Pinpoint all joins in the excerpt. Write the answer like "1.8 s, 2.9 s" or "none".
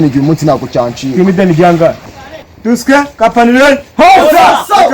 2.1 s